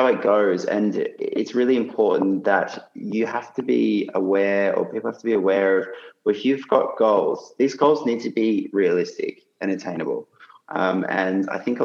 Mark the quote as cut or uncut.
uncut